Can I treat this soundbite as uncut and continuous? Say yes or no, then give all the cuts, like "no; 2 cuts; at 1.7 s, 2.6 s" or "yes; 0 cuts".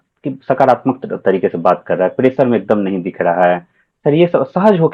yes; 0 cuts